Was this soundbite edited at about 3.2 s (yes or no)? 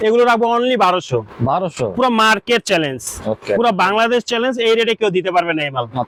no